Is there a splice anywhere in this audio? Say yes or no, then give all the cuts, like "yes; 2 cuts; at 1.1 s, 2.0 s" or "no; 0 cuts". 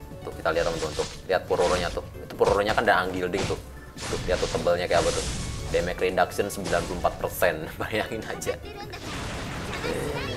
no; 0 cuts